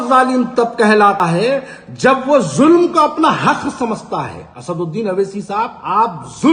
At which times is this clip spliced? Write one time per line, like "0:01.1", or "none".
0:01.2